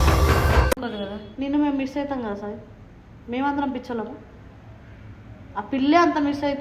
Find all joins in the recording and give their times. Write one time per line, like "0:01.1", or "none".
0:00.9